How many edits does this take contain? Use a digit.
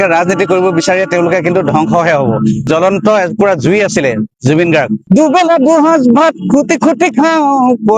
2